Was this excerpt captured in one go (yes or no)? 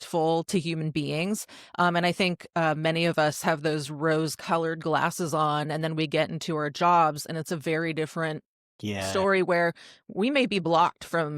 yes